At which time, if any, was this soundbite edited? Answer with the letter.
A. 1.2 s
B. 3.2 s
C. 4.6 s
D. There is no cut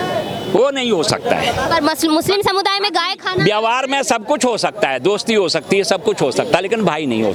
D